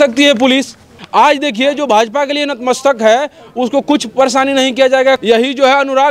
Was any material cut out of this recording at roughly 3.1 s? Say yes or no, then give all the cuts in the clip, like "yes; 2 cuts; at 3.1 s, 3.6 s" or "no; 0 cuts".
no; 2 cuts; at 1.0 s, 5.2 s